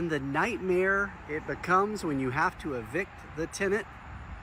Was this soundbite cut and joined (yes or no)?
no